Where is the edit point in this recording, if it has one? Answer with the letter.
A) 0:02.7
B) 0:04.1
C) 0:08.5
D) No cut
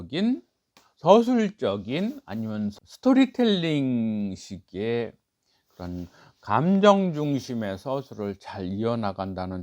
A